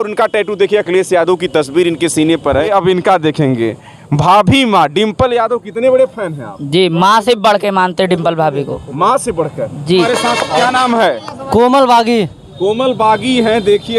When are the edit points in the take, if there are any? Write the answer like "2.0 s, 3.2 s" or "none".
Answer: 2.7 s, 10.1 s